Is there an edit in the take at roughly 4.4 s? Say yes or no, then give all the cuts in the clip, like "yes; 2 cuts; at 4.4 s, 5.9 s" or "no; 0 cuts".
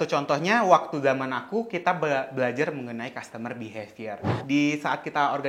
yes; 1 cut; at 4.4 s